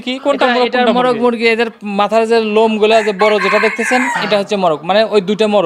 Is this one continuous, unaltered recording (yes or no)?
yes